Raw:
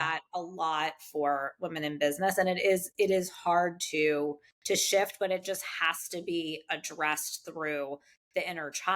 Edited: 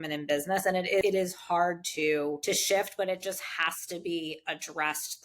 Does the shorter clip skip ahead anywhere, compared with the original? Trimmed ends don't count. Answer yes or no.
yes